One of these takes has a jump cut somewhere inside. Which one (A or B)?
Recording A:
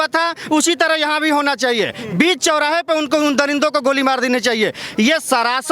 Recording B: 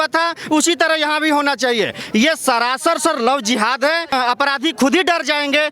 B